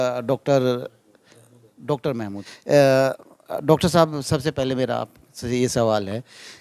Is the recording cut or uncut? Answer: cut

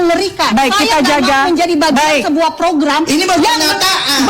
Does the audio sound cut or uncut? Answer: uncut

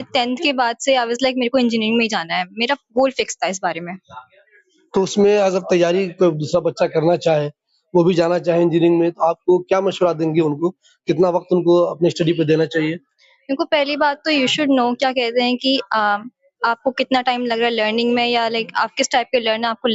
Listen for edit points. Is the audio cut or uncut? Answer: uncut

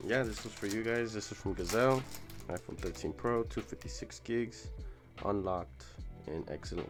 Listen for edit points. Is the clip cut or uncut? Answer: uncut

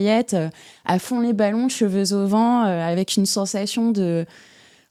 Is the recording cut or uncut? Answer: uncut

